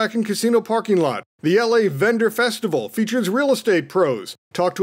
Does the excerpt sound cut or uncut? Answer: cut